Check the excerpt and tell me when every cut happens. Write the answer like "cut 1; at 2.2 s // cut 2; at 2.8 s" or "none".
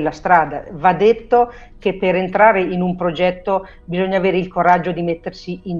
none

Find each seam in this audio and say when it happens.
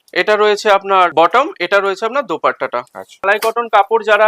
cut 1; at 1.1 s // cut 2; at 3.2 s

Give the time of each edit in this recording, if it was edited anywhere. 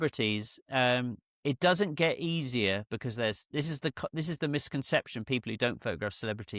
none

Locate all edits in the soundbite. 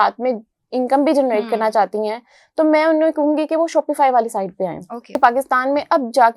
cut 1; at 5.2 s

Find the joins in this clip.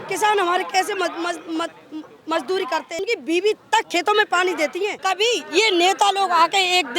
cut 1; at 3.0 s // cut 2; at 5.0 s

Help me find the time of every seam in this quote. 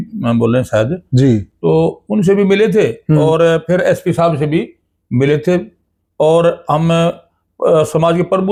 none

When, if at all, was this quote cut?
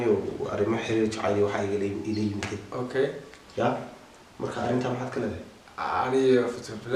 none

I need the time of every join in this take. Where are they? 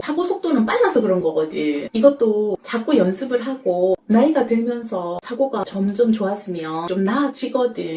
none

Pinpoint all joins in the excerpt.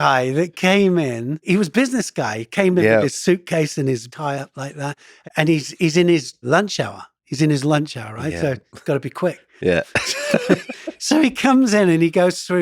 cut 1; at 1.4 s // cut 2; at 4.1 s // cut 3; at 5.1 s // cut 4; at 6.4 s

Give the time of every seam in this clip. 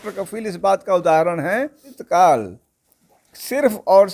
cut 1; at 2.0 s

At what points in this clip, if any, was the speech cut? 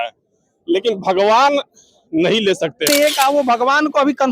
cut 1; at 2.9 s

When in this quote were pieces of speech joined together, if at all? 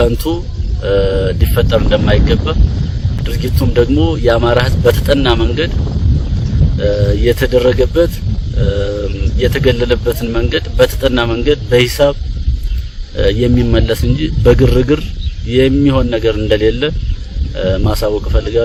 none

